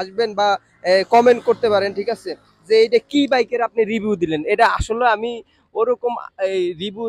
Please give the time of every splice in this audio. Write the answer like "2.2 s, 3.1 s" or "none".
none